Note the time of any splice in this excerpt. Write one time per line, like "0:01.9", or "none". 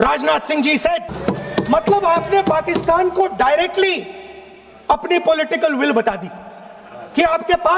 0:01.1